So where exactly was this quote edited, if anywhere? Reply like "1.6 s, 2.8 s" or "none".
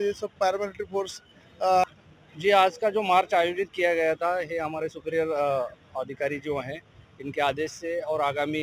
1.8 s